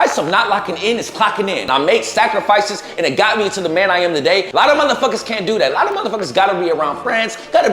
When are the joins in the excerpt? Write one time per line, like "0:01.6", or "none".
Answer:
0:01.7
0:04.5

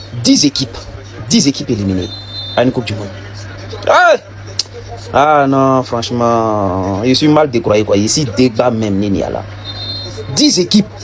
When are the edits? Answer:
none

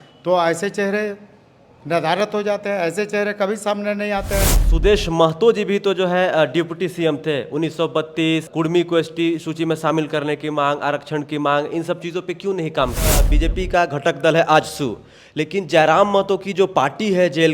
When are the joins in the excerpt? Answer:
0:04.6
0:08.5
0:13.3

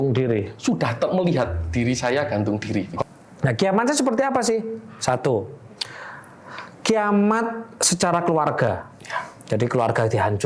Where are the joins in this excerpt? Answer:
0:02.9

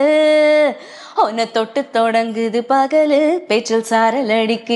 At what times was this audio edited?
none

